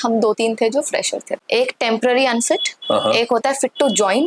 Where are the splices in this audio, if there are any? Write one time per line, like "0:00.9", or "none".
0:01.4